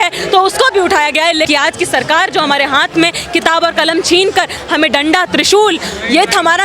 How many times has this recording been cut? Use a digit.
1